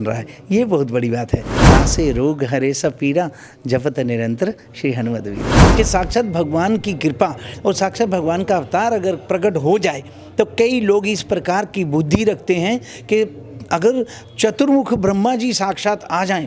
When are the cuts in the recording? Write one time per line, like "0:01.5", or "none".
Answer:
0:01.7
0:05.6